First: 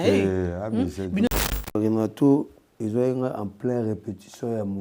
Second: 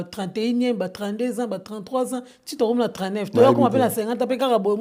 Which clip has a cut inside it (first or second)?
first